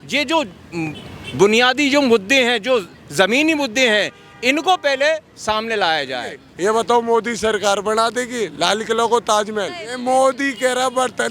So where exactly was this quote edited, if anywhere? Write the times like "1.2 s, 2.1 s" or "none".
6.5 s, 9.6 s